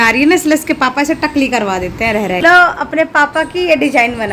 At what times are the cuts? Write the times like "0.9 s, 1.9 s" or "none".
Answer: 2.4 s